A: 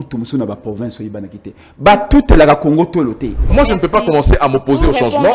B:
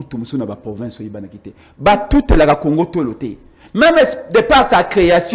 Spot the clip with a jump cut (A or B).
A